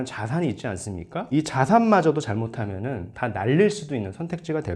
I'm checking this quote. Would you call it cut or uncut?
uncut